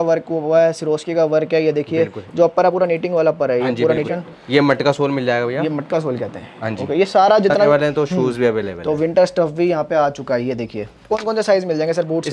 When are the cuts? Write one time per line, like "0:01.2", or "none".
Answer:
0:04.1
0:07.7
0:11.1